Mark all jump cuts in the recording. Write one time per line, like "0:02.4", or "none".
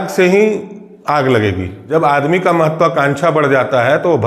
0:01.7